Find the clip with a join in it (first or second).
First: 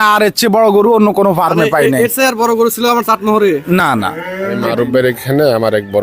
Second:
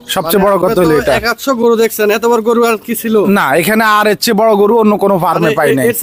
first